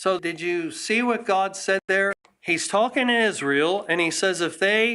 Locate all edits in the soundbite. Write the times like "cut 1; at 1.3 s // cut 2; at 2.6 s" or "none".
cut 1; at 2.1 s